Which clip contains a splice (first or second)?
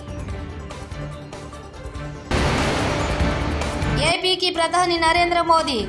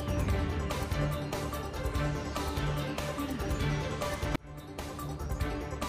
first